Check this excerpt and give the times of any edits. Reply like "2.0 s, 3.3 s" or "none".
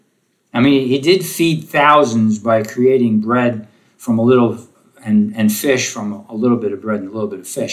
none